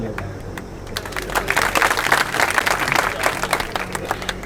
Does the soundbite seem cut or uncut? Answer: uncut